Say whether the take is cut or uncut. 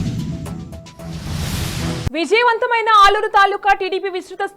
cut